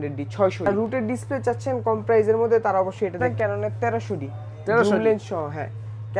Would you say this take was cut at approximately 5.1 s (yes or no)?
no